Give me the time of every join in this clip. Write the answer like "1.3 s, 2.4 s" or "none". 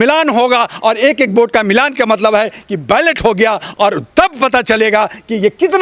none

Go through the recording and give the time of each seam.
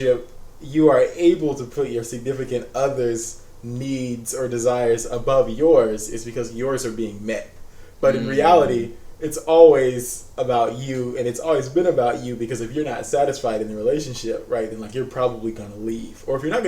none

